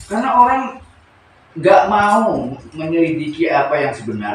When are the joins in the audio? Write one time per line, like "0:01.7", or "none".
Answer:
none

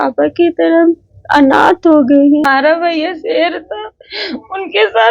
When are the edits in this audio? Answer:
0:02.5

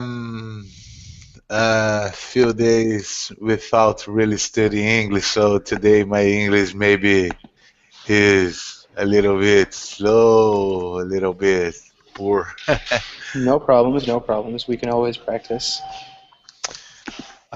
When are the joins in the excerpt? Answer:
0:09.7

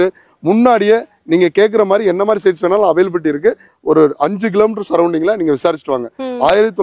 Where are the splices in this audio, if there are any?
0:03.7

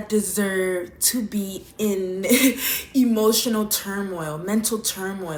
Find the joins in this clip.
none

